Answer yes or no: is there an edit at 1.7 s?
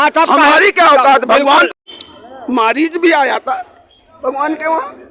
yes